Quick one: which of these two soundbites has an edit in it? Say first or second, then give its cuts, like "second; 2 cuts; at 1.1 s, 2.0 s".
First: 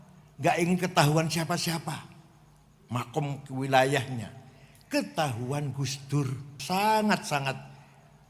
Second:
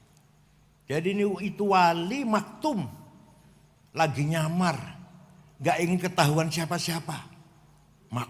first; 1 cut; at 6.6 s